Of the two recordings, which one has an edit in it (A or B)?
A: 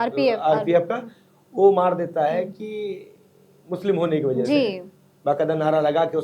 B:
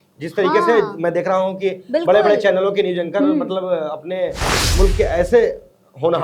B